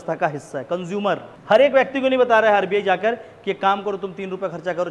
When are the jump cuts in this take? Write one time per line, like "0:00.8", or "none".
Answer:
0:01.3